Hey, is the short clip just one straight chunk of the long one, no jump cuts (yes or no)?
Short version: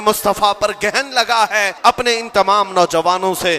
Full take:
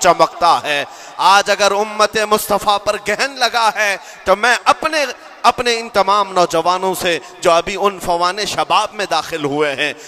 no